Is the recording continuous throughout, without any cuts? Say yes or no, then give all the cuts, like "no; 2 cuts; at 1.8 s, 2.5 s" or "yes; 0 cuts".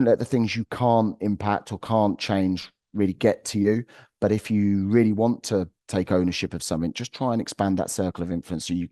yes; 0 cuts